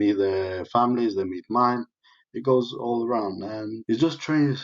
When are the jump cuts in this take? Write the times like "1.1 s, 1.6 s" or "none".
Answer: 3.7 s